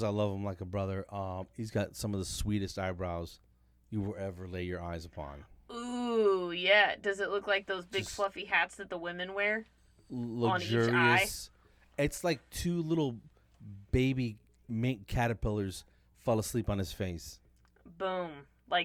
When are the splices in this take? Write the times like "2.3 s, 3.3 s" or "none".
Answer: none